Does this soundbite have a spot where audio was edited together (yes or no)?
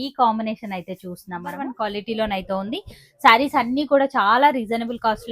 yes